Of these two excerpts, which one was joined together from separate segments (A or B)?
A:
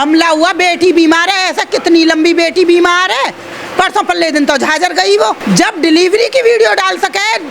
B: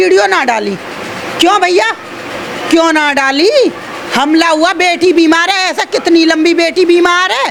A